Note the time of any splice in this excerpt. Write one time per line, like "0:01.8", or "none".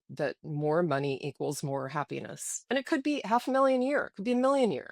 0:02.6